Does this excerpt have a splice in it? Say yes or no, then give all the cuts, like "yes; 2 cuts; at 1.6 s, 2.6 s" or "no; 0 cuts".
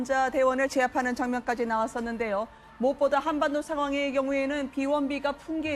yes; 1 cut; at 3.9 s